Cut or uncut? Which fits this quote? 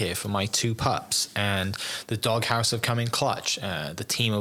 uncut